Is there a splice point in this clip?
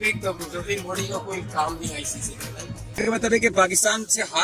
yes; 1 cut; at 3.0 s

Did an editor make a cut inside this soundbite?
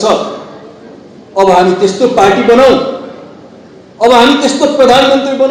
no; 0 cuts

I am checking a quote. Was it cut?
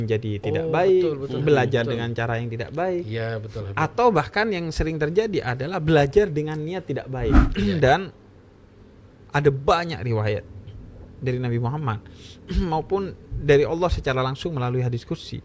yes; 1 cut; at 7.4 s

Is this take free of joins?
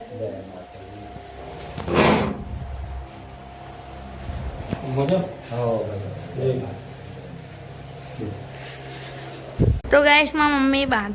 no; 1 cut; at 9.8 s

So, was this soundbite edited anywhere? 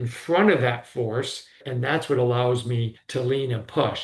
yes; 2 cuts; at 1.7 s, 2.9 s

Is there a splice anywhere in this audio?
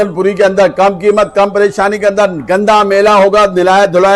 no; 0 cuts

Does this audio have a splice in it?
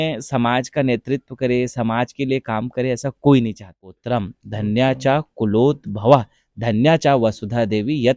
yes; 1 cut; at 4.0 s

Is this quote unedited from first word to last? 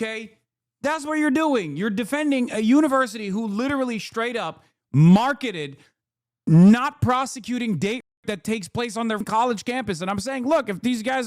no; 1 cut; at 9.3 s

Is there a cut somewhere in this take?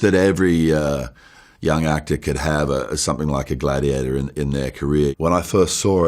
yes; 1 cut; at 5.2 s

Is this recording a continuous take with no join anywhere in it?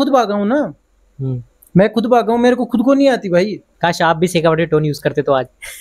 no; 1 cut; at 3.6 s

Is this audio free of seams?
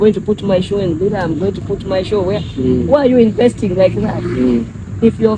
yes; 0 cuts

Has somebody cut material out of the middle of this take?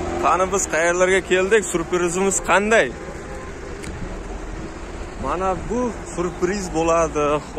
no; 0 cuts

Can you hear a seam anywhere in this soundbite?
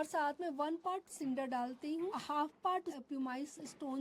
yes; 2 cuts; at 2.2 s, 3.0 s

